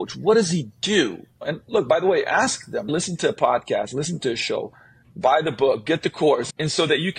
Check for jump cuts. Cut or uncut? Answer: uncut